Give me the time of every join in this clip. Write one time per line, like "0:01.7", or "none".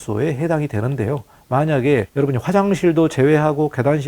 0:01.3
0:02.1